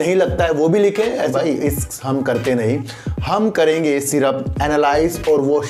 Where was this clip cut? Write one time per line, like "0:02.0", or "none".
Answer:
0:01.3